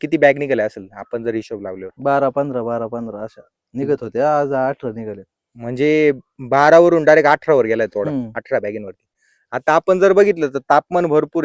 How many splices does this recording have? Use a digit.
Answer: 0